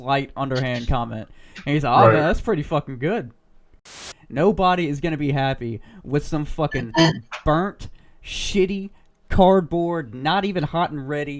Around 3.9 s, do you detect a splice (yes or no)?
yes